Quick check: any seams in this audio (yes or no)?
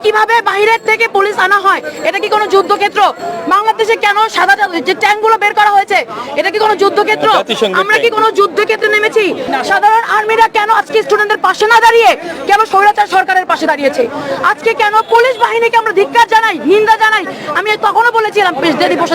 yes